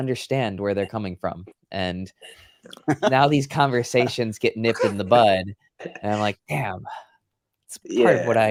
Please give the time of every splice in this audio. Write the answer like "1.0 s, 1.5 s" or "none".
none